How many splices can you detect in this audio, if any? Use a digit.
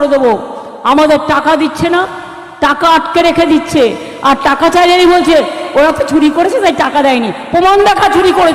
0